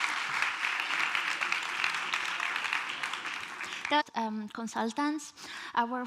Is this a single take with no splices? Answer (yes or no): yes